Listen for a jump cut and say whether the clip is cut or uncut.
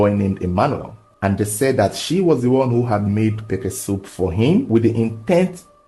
cut